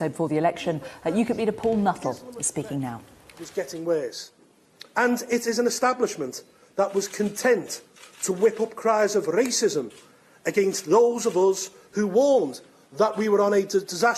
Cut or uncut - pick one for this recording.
uncut